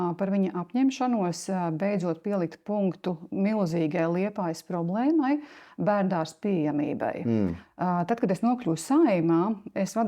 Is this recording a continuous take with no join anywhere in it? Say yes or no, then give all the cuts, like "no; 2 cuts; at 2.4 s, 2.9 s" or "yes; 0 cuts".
no; 1 cut; at 7.6 s